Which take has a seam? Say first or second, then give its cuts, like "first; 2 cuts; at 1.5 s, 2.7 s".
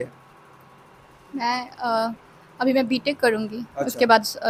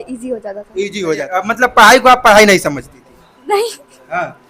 second; 1 cut; at 1.1 s